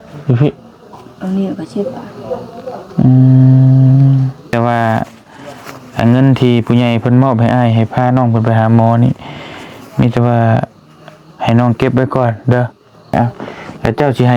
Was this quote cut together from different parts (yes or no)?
yes